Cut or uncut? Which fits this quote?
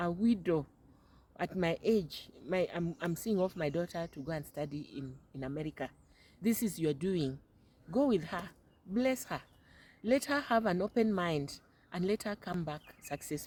uncut